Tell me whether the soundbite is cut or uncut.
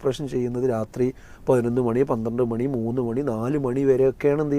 uncut